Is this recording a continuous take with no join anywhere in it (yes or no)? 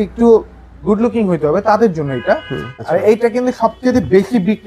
no